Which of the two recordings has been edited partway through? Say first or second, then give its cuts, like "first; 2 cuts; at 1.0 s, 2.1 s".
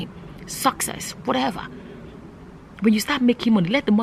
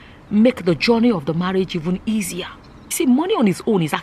second; 1 cut; at 2.8 s